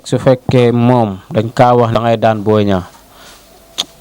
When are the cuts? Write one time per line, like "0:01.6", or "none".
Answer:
0:02.0